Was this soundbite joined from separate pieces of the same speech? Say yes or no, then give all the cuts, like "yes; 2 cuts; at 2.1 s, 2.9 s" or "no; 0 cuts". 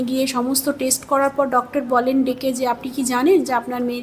yes; 1 cut; at 1.7 s